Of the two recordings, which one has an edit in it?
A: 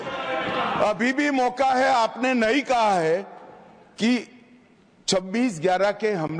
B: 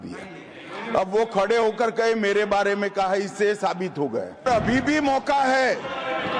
B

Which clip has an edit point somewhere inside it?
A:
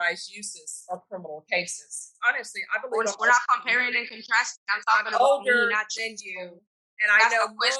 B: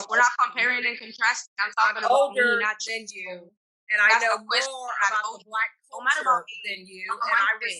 A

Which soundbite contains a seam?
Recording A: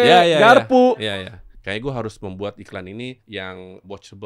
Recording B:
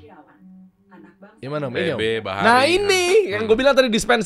A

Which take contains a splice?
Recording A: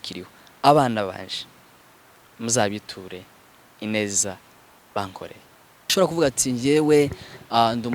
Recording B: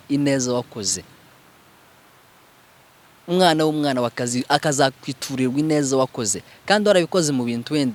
A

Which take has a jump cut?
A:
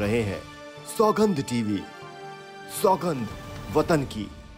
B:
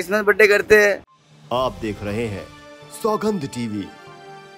B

